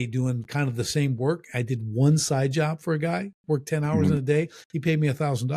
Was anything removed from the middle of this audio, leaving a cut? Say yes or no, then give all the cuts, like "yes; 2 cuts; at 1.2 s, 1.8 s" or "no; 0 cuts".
no; 0 cuts